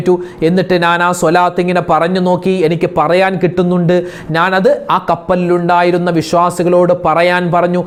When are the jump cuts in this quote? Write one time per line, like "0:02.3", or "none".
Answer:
none

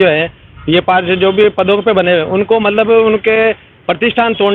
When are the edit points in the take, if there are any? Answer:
none

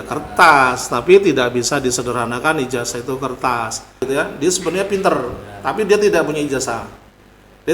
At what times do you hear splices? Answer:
0:04.0

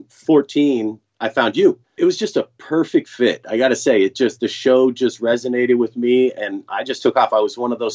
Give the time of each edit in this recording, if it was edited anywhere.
0:01.9

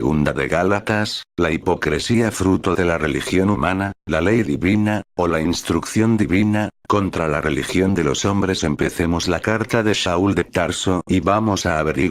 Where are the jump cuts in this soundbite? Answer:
0:03.4

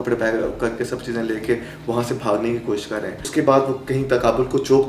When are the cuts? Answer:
0:03.2

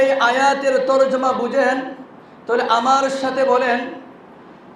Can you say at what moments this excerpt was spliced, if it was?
none

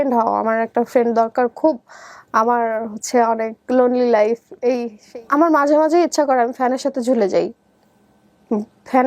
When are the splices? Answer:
0:04.9

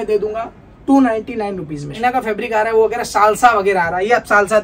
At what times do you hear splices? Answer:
0:02.0

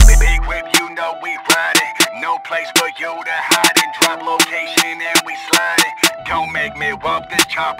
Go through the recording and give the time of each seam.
none

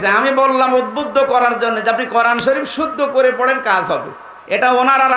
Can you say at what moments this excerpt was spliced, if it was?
none

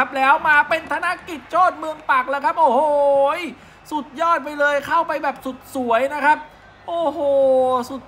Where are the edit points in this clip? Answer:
none

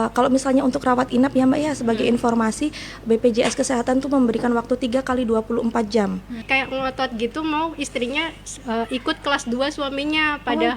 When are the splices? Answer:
0:06.4

